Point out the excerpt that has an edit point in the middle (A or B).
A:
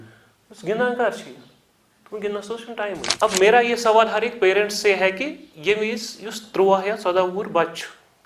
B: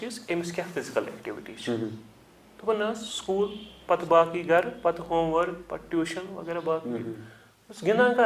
A